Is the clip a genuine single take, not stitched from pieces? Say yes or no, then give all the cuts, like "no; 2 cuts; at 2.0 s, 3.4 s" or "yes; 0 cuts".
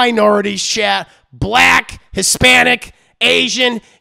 yes; 0 cuts